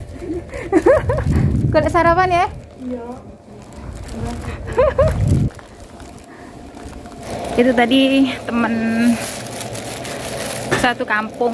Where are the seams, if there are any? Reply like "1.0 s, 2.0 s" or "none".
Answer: none